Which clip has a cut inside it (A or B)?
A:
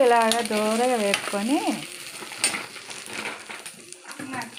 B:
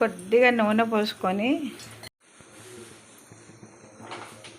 B